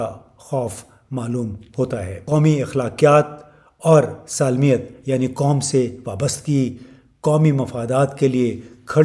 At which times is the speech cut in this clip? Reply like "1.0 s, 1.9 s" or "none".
2.1 s